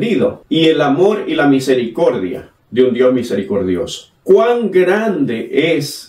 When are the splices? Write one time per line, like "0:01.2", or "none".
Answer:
0:04.1